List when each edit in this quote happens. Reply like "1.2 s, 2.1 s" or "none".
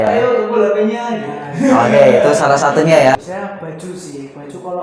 3.2 s